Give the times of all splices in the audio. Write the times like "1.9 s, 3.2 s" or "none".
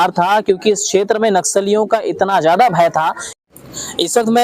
3.3 s